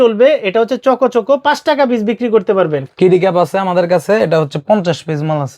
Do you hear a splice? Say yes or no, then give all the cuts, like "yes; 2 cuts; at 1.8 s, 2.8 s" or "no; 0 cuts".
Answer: yes; 1 cut; at 2.8 s